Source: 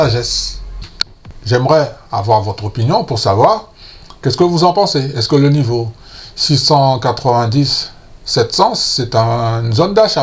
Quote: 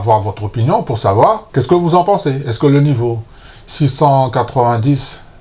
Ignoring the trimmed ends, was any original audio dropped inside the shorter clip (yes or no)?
yes